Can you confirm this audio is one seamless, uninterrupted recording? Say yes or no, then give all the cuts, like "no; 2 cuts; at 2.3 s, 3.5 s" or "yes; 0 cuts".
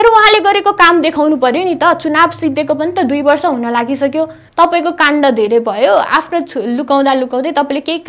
no; 1 cut; at 4.4 s